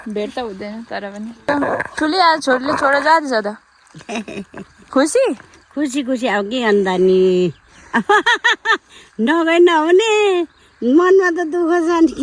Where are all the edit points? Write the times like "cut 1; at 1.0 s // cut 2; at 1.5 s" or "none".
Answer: cut 1; at 1.5 s